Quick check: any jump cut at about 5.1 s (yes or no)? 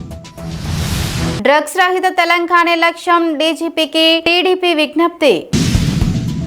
no